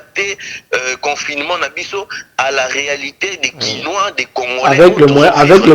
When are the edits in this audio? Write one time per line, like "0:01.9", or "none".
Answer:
none